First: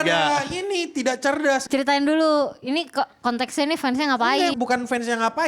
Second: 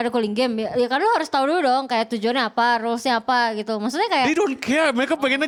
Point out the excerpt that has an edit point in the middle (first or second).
first